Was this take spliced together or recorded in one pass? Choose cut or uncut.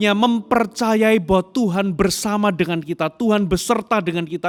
uncut